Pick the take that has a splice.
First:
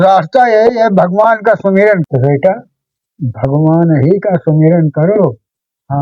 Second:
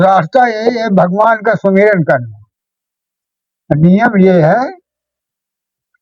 first; 1 cut; at 2.0 s

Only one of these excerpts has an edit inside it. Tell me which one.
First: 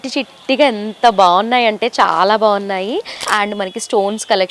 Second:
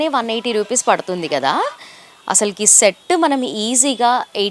first; 1 cut; at 3.3 s

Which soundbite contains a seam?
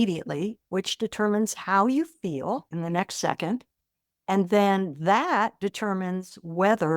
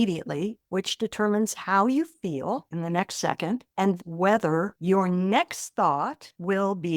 second; 1 cut; at 4.0 s

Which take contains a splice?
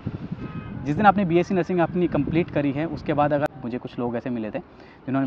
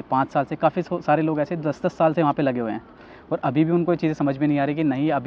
first; 1 cut; at 3.5 s

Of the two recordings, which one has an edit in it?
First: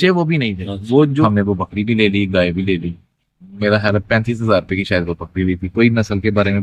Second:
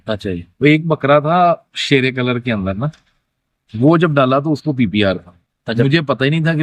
first; 1 cut; at 1.2 s

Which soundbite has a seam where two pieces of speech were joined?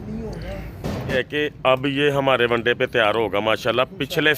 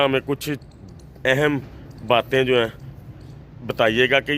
first; 1 cut; at 1.1 s

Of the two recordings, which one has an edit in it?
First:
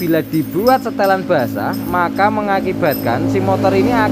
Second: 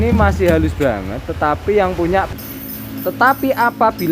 second; 1 cut; at 2.3 s

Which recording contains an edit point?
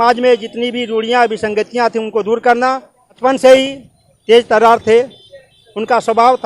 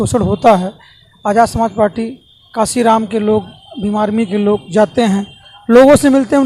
first; 1 cut; at 3.2 s

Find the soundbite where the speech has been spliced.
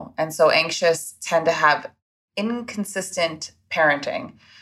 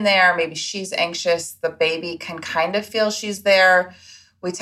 first; 1 cut; at 1.9 s

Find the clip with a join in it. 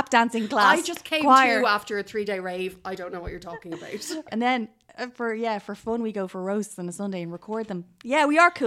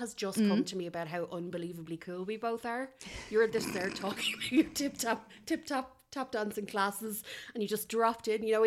first; 1 cut; at 4.2 s

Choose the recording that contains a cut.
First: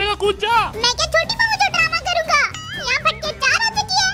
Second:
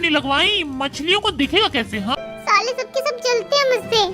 second; 1 cut; at 2.1 s

